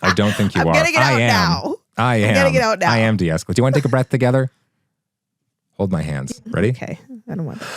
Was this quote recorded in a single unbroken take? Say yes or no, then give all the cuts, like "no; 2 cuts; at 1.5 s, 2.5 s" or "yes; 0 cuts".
no; 1 cut; at 6.3 s